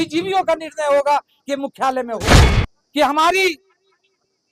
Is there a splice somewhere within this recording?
yes; 1 cut; at 2.3 s

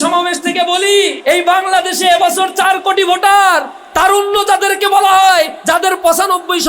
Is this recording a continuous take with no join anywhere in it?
no; 2 cuts; at 1.2 s, 5.6 s

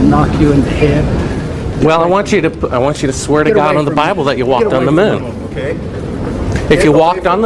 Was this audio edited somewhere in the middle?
no; 0 cuts

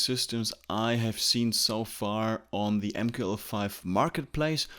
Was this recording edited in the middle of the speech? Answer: no; 0 cuts

